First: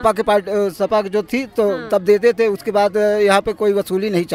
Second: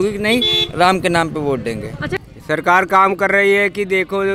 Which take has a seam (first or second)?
second